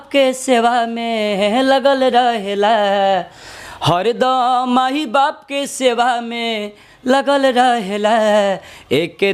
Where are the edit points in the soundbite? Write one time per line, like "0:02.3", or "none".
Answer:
none